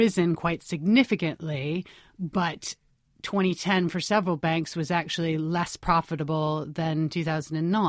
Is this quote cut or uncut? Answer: uncut